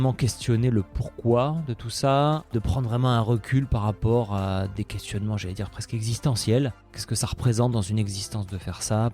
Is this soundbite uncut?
no; 2 cuts; at 2.5 s, 7.0 s

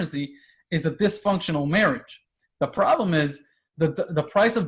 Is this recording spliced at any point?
no; 0 cuts

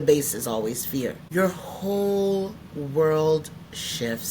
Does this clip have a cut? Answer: yes; 1 cut; at 1.2 s

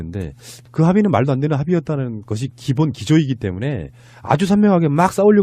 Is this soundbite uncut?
no; 1 cut; at 3.3 s

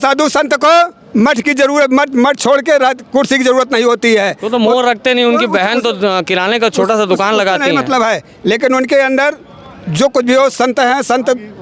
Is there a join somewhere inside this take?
no; 0 cuts

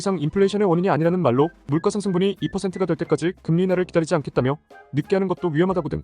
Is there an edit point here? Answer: yes; 1 cut; at 1.6 s

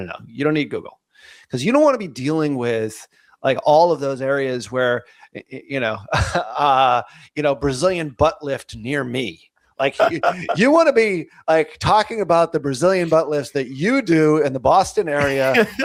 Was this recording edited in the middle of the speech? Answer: no; 0 cuts

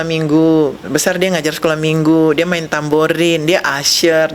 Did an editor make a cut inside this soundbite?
no; 0 cuts

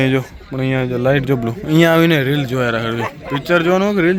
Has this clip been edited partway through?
no; 0 cuts

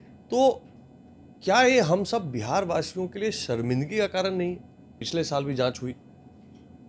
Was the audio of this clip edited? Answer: yes; 1 cut; at 5.0 s

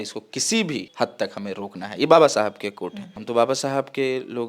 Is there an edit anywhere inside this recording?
yes; 1 cut; at 3.1 s

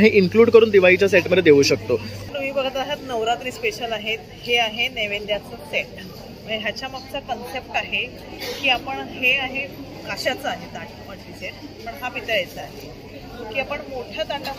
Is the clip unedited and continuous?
no; 1 cut; at 2.2 s

